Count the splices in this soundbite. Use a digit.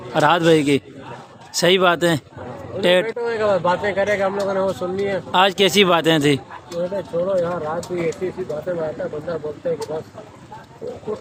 0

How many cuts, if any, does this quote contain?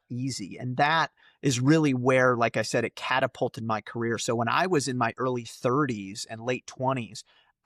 0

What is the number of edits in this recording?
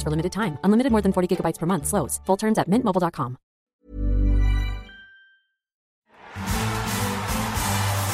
2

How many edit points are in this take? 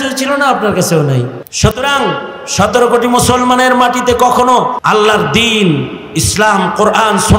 2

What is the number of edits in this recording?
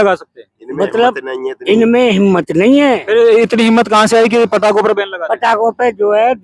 0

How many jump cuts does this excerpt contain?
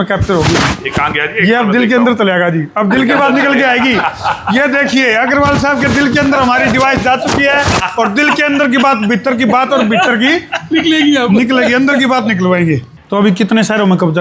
1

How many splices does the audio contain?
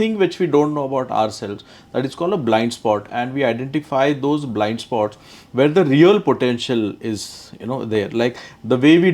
0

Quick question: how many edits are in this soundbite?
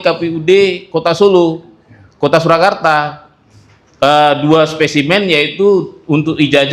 0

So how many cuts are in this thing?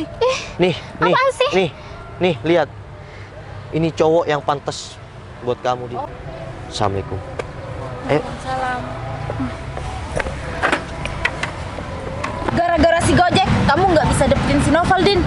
1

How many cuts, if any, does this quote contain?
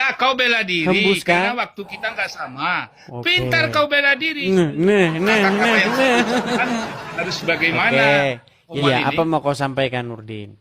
2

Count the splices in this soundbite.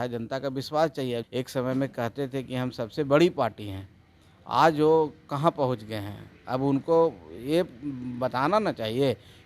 1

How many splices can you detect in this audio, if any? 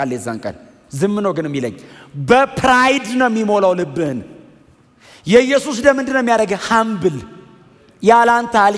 0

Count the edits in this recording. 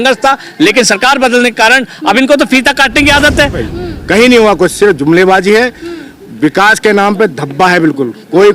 1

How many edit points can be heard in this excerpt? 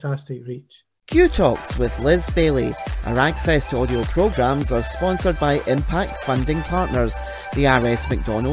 1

